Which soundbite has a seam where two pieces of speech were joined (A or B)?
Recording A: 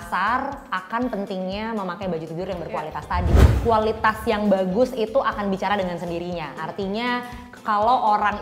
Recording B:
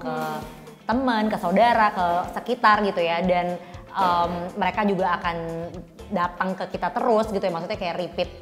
A